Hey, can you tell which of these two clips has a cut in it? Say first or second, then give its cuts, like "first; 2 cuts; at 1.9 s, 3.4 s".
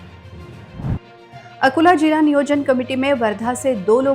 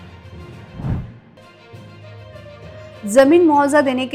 second; 1 cut; at 1.0 s